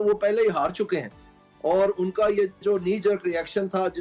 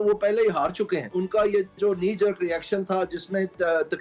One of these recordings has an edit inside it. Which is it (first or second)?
second